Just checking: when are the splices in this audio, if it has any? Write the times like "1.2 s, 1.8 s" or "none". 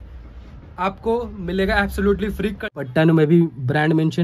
2.6 s